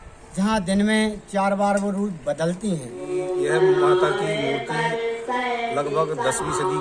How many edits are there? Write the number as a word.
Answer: one